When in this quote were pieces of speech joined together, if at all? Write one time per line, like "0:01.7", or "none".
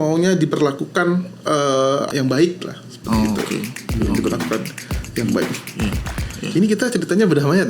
0:02.1